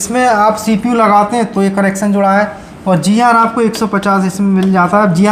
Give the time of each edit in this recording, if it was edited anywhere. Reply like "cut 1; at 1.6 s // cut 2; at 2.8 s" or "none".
none